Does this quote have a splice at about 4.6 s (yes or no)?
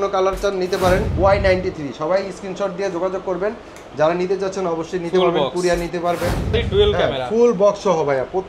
no